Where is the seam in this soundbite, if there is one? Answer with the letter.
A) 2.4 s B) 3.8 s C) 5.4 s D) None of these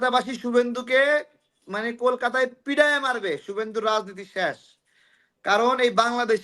D